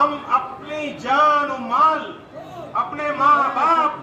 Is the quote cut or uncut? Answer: uncut